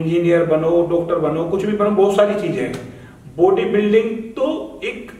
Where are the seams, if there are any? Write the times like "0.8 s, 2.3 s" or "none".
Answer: none